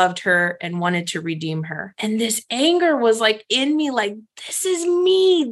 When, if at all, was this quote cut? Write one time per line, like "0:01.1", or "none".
0:01.8